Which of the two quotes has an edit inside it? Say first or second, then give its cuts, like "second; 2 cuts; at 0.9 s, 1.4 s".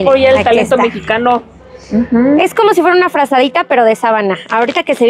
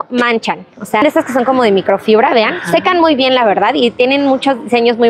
second; 1 cut; at 1.0 s